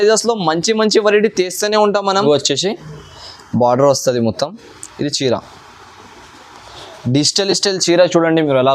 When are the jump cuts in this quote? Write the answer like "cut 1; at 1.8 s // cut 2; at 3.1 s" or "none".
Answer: cut 1; at 2.2 s